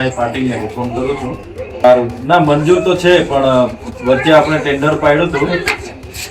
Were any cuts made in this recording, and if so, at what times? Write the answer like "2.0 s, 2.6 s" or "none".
1.8 s